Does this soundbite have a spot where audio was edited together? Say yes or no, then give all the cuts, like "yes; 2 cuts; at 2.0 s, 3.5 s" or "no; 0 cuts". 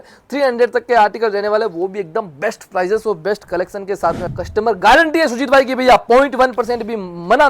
yes; 1 cut; at 4.3 s